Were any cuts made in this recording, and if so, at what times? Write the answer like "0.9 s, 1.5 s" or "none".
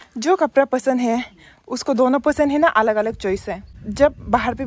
3.8 s